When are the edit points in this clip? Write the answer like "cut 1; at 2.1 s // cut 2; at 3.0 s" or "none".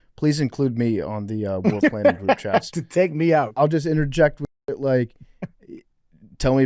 cut 1; at 3.4 s